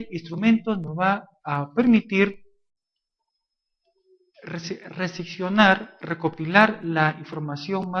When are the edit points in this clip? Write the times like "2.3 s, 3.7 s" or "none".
5.3 s